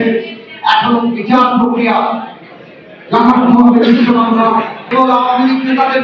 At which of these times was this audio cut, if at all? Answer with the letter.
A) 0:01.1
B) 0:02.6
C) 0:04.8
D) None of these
C